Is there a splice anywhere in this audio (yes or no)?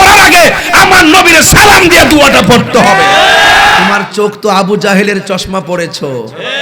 yes